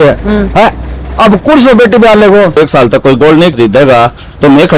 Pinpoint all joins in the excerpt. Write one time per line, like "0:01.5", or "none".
0:02.6
0:03.5